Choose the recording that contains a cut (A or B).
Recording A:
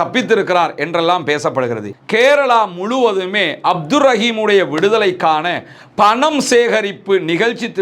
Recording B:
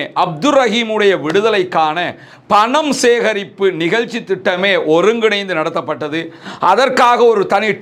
A